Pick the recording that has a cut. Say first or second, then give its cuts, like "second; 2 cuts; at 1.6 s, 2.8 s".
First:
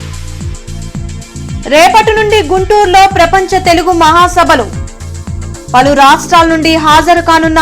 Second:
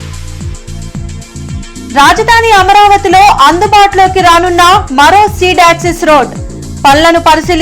second; 1 cut; at 1.4 s